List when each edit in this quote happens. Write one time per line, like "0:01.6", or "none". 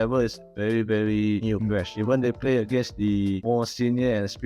0:01.7
0:03.4